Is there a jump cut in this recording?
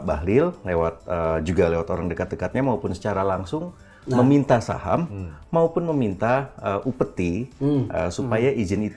no; 0 cuts

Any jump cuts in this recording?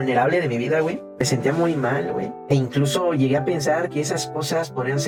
no; 0 cuts

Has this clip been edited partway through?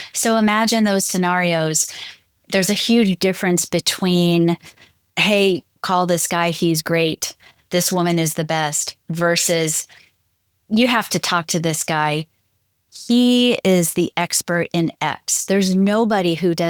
no; 0 cuts

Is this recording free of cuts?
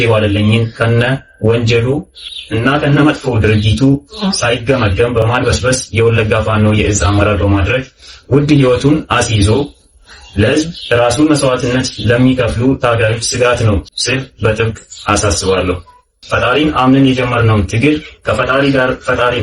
no; 3 cuts; at 5.2 s, 13.9 s, 16.1 s

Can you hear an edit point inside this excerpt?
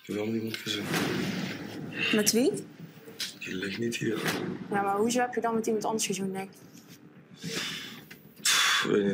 yes; 1 cut; at 4.8 s

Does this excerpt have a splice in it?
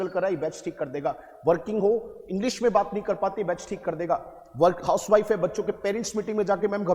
no; 0 cuts

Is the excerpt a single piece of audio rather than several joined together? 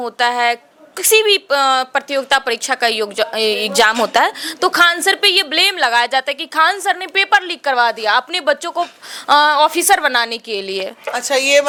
yes; 0 cuts

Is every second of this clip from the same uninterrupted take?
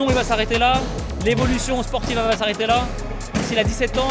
yes; 0 cuts

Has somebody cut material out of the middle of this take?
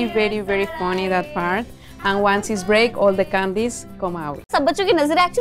yes; 1 cut; at 4.5 s

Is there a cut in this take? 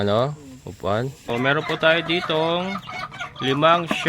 yes; 1 cut; at 1.3 s

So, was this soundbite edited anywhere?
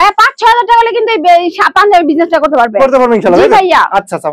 no; 0 cuts

